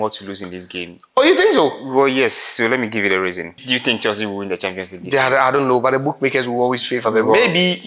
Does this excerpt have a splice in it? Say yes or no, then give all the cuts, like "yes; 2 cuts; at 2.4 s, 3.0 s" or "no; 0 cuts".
yes; 1 cut; at 3.6 s